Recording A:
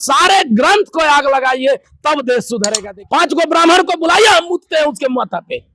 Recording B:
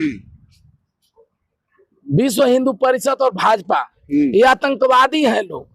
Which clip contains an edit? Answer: A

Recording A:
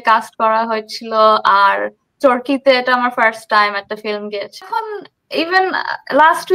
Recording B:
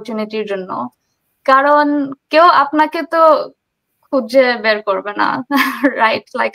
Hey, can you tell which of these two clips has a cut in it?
A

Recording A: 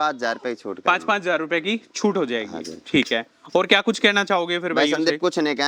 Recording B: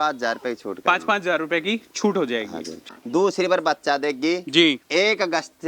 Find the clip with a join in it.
B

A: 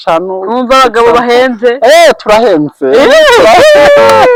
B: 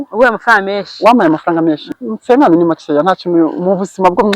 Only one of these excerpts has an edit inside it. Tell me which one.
B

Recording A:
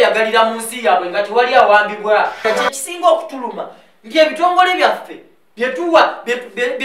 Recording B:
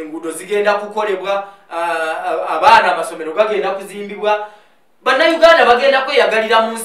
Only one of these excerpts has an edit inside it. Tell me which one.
A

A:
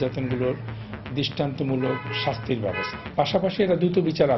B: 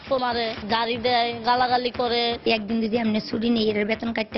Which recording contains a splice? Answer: B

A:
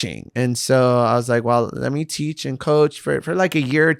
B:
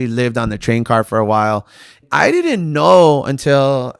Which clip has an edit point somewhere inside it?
B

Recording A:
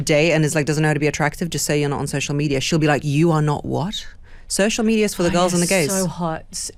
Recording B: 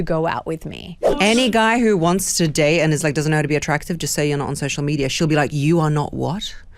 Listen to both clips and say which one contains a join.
B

